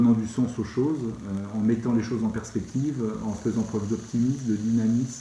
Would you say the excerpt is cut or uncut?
uncut